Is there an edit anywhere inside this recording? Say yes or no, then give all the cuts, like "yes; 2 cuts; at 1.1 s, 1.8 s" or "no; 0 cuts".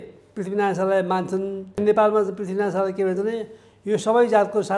yes; 1 cut; at 1.8 s